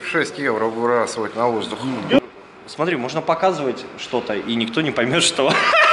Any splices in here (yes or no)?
yes